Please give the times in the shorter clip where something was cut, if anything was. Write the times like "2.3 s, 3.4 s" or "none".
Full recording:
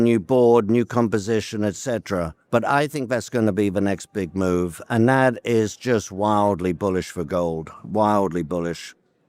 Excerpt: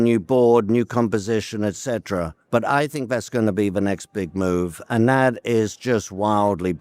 none